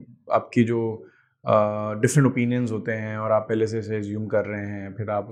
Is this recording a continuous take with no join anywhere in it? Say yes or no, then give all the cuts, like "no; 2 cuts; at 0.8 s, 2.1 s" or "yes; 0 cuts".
yes; 0 cuts